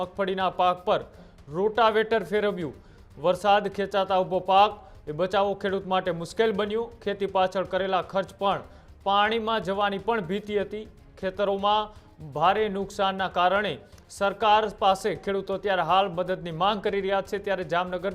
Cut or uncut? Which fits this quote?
uncut